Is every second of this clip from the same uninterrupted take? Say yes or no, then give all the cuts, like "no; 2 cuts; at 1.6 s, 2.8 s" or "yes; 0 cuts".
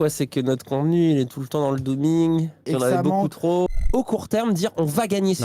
no; 2 cuts; at 2.6 s, 3.8 s